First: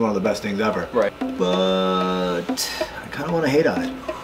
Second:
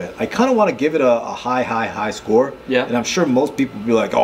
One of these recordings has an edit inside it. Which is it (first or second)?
first